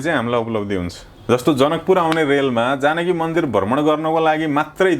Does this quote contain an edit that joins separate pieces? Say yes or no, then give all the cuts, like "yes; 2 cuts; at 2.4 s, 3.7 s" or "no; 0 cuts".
no; 0 cuts